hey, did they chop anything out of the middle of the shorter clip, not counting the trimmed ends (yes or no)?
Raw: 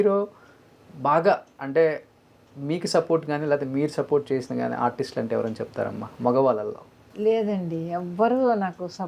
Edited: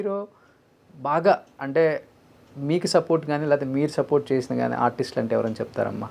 no